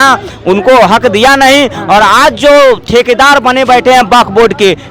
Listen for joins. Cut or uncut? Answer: uncut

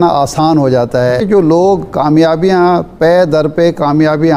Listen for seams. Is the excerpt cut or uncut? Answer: cut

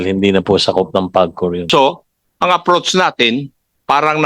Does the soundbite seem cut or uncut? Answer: cut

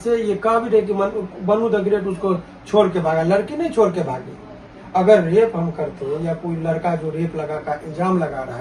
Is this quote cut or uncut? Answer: uncut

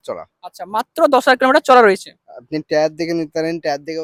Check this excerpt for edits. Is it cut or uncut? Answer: uncut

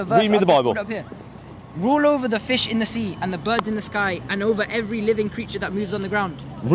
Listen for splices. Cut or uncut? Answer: uncut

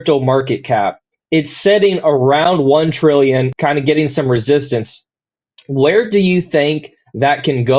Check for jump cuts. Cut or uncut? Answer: uncut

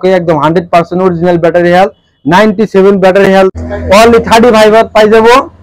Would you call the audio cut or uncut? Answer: uncut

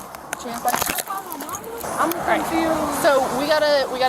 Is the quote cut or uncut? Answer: cut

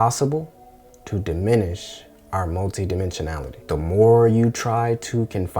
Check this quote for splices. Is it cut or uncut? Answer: cut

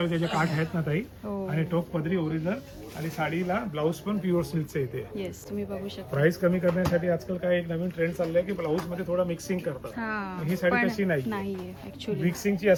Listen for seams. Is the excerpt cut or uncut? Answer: uncut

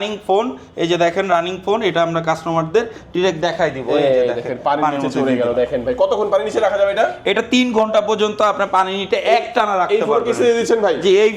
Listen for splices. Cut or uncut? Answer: uncut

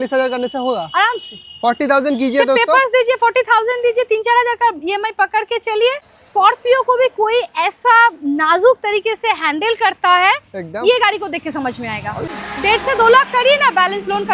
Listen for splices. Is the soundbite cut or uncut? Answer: cut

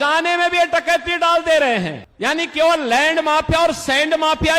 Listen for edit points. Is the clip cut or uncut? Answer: cut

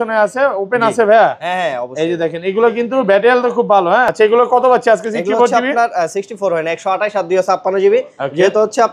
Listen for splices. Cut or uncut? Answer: cut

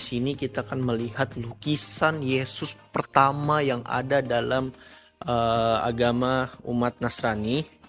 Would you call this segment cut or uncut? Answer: uncut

